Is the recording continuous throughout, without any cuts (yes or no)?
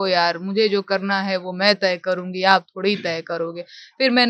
yes